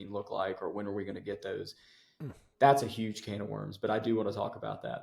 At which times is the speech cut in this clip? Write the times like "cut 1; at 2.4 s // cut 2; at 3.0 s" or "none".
none

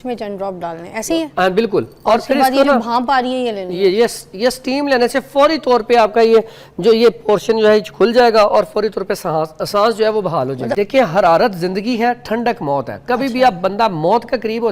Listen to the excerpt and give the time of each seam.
cut 1; at 10.7 s

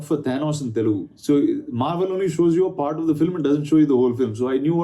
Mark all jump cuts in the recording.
cut 1; at 1.1 s

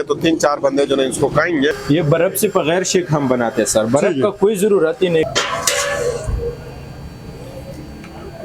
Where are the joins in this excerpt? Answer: cut 1; at 1.8 s // cut 2; at 5.3 s

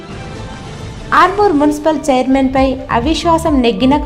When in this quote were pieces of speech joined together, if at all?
cut 1; at 0.9 s

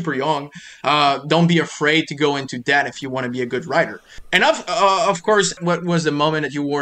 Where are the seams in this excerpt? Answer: cut 1; at 4.2 s // cut 2; at 5.6 s

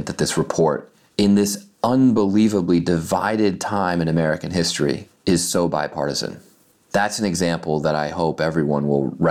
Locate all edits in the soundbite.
none

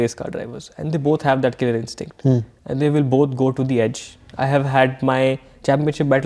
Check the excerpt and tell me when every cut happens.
none

